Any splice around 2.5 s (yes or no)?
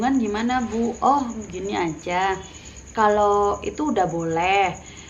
no